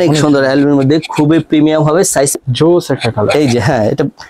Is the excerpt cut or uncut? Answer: cut